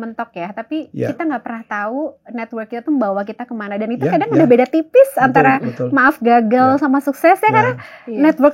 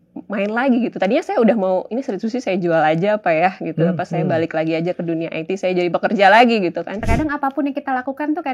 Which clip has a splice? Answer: second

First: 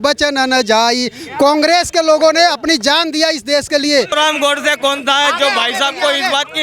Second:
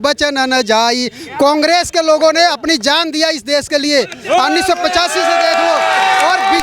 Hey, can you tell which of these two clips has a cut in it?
first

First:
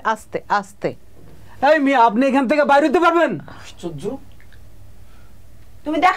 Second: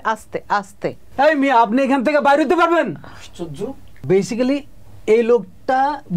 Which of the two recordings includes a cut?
second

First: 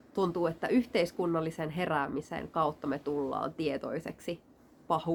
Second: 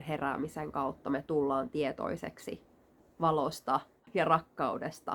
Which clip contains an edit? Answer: second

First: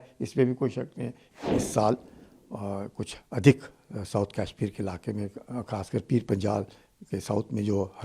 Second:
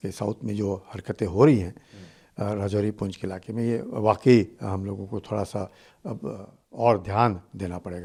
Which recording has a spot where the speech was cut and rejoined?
first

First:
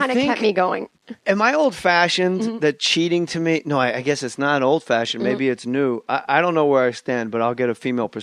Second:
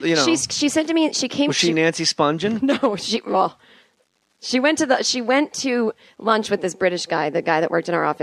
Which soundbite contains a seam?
second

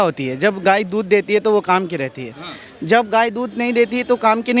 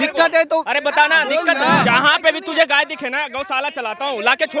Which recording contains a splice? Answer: second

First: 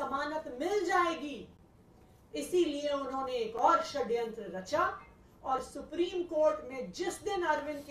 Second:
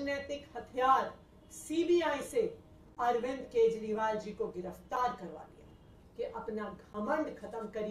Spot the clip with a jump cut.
second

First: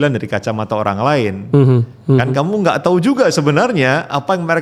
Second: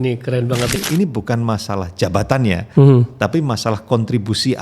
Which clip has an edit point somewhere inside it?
second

